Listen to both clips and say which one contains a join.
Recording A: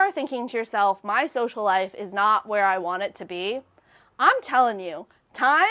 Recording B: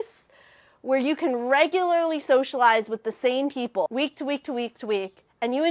B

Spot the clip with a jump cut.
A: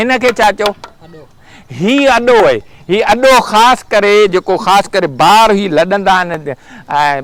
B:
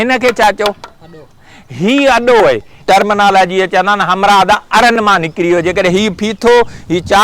B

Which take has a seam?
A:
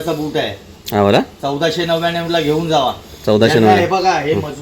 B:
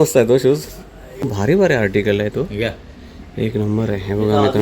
B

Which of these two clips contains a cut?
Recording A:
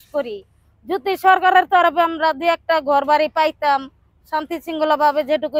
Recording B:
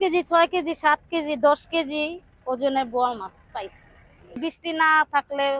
B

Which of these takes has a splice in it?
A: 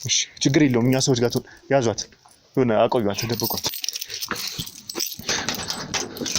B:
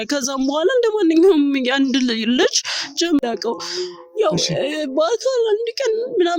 B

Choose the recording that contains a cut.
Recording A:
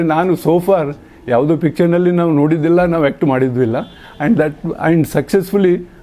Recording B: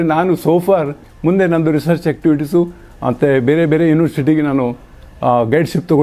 B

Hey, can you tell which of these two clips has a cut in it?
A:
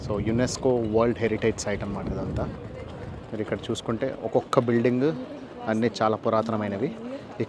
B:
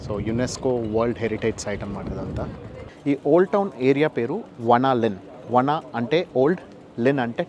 B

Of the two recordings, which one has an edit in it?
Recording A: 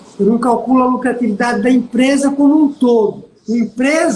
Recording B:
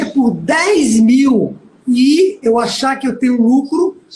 B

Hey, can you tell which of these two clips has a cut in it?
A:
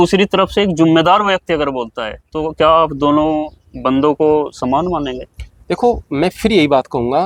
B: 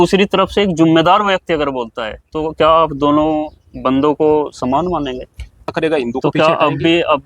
B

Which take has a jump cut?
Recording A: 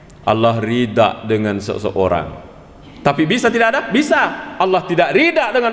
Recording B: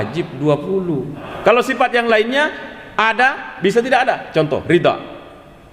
B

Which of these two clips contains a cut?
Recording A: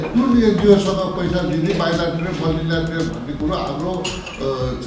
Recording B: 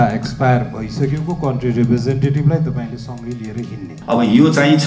B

